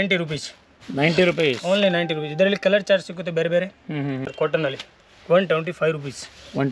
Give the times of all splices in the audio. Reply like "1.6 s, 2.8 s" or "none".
4.7 s